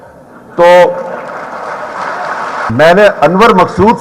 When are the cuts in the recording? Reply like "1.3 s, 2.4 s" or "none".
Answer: 2.7 s

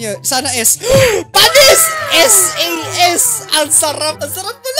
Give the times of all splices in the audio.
none

